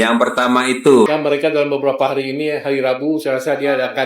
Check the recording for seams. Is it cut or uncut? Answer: cut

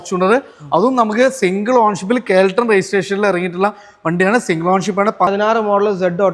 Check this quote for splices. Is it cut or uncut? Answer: cut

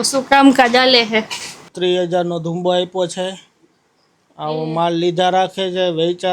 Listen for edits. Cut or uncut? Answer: cut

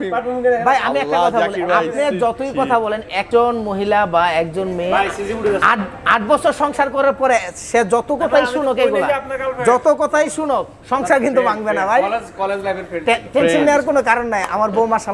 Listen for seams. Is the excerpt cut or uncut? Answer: cut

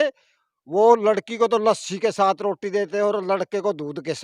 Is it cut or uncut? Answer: uncut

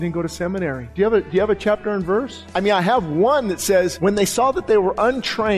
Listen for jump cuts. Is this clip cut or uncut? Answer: cut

